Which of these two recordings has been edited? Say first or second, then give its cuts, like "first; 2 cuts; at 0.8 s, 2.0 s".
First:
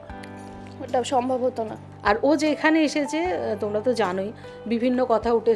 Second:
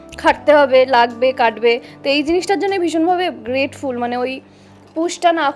first; 1 cut; at 1.9 s